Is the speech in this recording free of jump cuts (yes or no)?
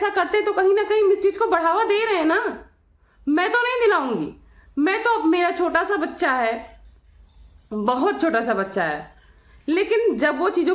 yes